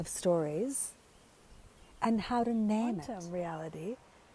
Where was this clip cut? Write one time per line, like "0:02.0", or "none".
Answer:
0:03.0